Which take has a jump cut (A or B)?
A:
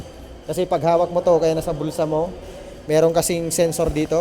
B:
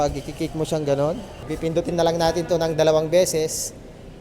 B